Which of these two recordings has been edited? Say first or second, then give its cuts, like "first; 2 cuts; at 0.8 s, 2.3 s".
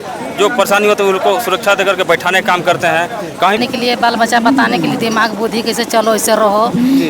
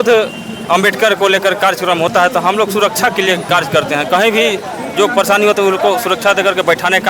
first; 1 cut; at 3.6 s